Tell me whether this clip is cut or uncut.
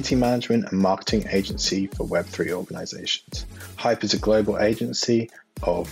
uncut